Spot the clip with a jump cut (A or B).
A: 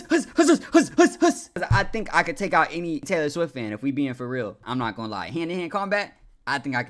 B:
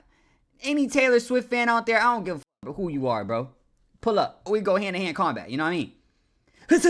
A